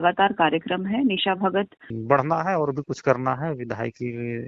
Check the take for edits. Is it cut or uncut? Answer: cut